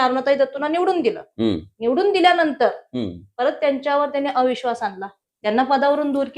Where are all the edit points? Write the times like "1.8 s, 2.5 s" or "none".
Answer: 5.3 s